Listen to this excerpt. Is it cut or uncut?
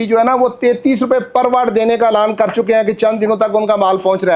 uncut